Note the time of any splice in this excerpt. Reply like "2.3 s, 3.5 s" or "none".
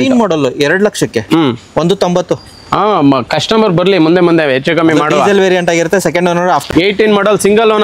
6.7 s